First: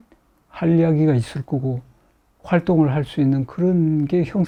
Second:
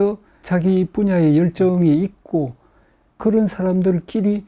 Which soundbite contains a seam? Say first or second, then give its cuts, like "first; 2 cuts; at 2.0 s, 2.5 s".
second; 1 cut; at 3.2 s